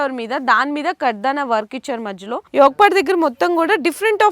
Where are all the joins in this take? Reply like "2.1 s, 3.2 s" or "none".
2.3 s